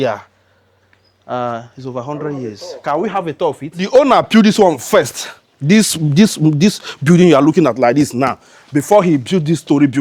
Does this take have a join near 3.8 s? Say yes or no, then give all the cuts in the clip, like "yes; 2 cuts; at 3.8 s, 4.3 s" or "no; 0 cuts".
yes; 1 cut; at 3.8 s